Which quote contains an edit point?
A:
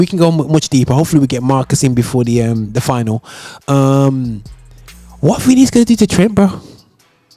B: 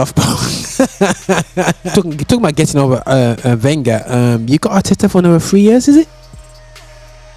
B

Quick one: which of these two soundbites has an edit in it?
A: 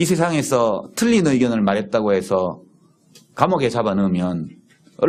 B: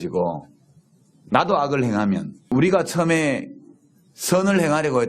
B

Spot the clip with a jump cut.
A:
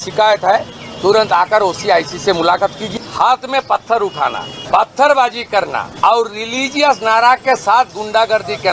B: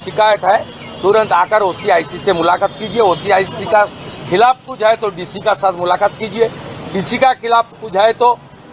A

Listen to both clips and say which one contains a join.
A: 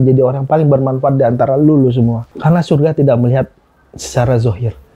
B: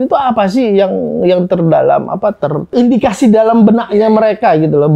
A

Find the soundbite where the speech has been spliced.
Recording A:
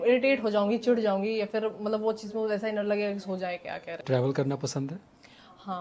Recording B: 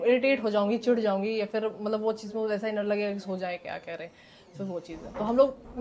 A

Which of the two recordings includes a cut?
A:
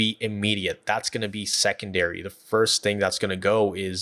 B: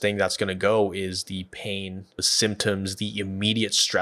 B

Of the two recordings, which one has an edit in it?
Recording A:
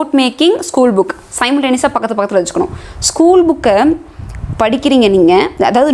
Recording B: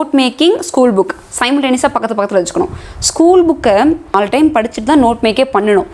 B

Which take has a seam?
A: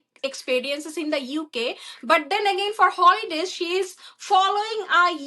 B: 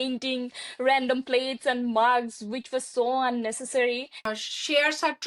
B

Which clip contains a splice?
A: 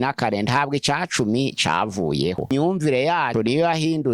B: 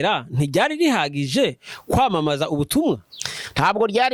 A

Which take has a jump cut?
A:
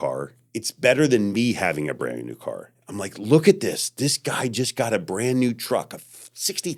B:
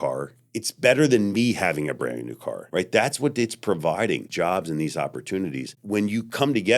B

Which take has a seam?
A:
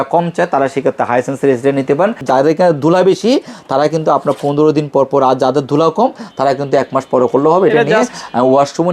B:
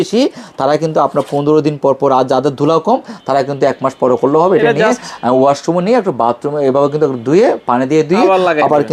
A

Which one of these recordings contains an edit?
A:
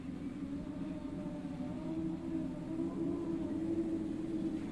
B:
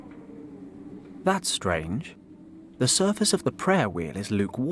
B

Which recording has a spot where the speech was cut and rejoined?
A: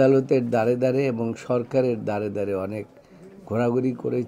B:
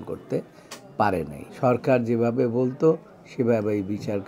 B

